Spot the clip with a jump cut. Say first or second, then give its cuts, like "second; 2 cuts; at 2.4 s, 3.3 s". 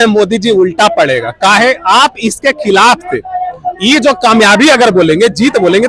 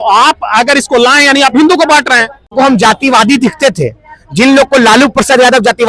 second; 1 cut; at 2.5 s